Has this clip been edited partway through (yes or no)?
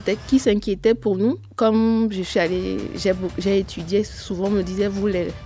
yes